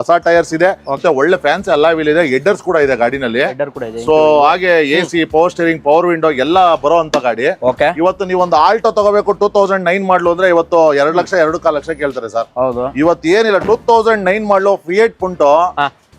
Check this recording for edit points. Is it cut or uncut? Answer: cut